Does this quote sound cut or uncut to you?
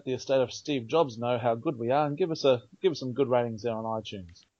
uncut